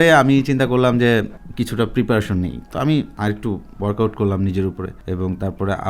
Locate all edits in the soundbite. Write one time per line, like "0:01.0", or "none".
0:01.4
0:03.1
0:04.9